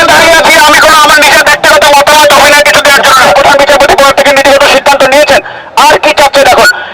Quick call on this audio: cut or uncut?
cut